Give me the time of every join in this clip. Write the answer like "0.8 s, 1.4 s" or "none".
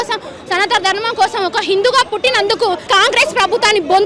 2.9 s